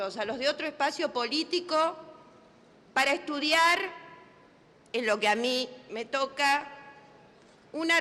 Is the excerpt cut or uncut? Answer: uncut